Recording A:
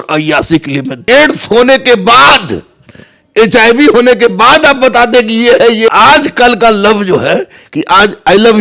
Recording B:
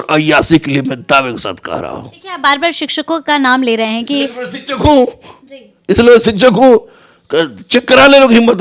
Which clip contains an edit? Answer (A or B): A